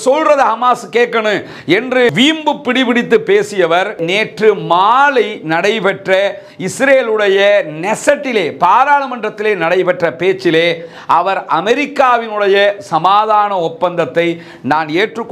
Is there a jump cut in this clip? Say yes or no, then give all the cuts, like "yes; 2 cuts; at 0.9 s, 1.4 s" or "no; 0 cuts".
no; 0 cuts